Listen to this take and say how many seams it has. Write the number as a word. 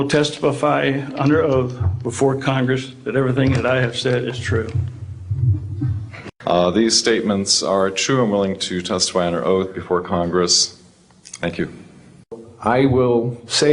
two